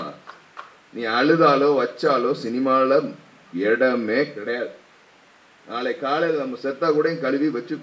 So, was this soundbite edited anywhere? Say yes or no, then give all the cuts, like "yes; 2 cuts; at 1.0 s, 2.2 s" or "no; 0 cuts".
no; 0 cuts